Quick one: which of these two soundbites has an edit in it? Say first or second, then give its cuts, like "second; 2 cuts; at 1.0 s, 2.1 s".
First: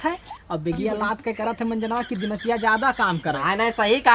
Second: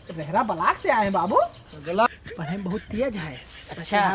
second; 1 cut; at 2.1 s